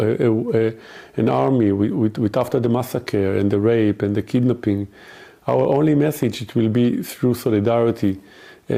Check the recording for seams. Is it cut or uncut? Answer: uncut